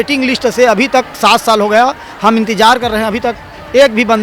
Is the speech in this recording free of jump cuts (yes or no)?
yes